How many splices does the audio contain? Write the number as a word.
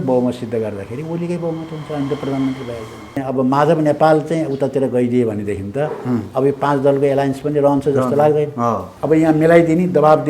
two